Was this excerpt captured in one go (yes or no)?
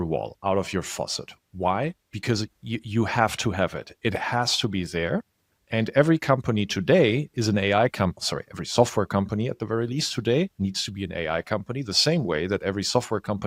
yes